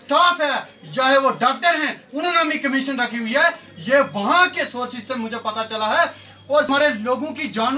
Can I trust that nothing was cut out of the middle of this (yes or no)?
no